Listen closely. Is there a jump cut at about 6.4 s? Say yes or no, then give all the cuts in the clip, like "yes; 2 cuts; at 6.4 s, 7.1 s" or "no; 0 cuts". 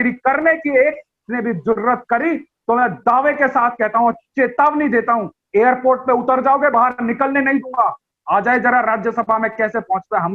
no; 1 cut; at 8.1 s